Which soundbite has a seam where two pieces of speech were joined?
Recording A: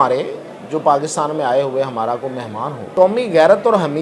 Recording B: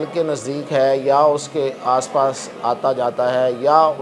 A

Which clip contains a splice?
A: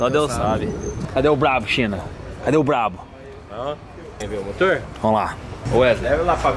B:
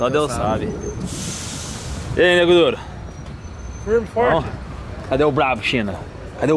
A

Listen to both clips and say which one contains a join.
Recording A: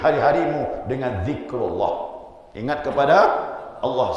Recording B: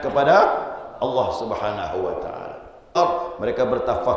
B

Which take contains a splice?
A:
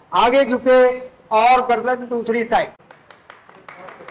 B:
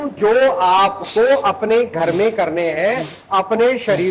A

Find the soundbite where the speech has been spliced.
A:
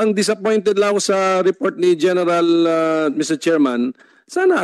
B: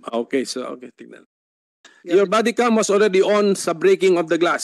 B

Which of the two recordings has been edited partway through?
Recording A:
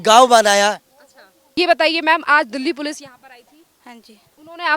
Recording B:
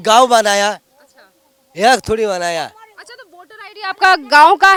A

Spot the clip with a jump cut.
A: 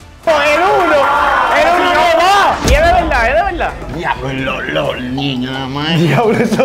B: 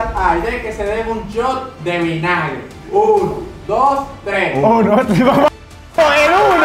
A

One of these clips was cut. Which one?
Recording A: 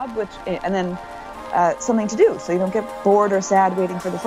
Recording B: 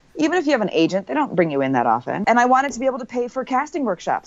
B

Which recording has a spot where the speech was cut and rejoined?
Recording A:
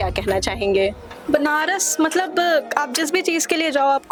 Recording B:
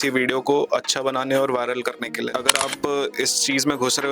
B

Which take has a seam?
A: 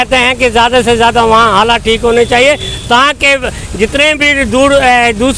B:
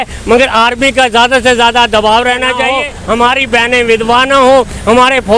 B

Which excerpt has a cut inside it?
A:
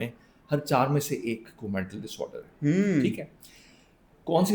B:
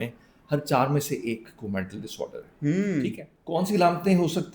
B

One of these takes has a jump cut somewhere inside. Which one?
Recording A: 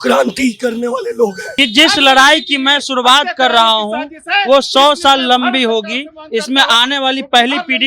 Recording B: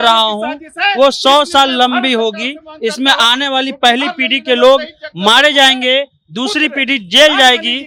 A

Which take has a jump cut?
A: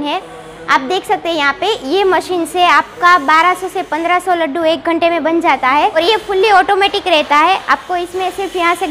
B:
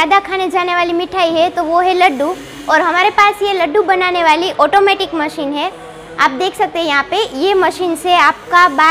A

